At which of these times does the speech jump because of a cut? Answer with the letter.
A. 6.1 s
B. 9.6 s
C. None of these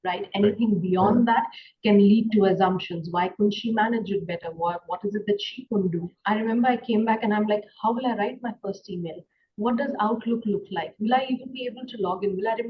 A